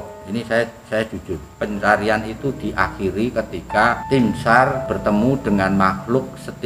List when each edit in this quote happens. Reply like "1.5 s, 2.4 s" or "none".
1.5 s, 4.0 s, 4.9 s